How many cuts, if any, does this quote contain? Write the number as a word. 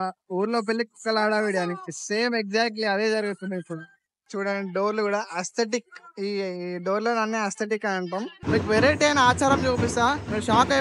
two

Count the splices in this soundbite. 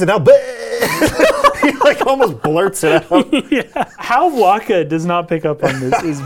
one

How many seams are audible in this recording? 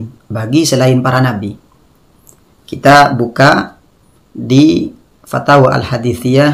zero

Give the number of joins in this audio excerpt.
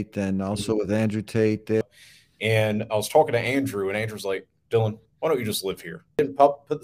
two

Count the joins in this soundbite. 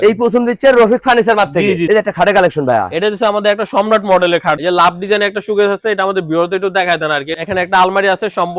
three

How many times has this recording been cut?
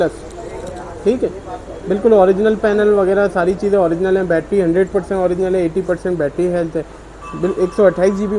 zero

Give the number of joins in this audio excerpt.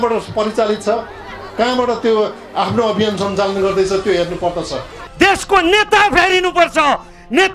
one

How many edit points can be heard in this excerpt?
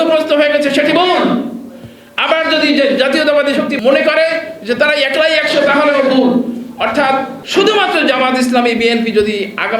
two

